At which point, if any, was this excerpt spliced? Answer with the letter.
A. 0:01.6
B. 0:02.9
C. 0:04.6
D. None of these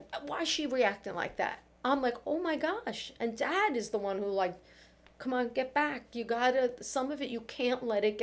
A